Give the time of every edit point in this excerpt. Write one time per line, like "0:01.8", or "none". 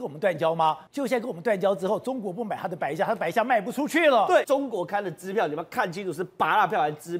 0:00.8
0:04.5